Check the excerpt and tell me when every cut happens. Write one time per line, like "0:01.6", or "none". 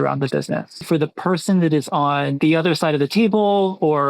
0:00.8
0:02.3